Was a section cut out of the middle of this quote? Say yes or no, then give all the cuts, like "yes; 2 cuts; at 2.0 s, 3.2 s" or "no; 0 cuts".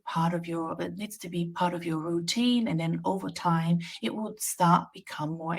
no; 0 cuts